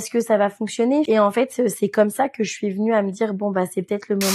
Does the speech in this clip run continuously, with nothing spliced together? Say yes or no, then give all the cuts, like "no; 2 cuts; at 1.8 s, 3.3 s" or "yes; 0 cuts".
no; 1 cut; at 1.1 s